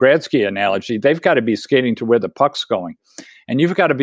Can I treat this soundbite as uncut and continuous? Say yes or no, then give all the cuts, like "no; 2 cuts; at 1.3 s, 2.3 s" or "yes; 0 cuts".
yes; 0 cuts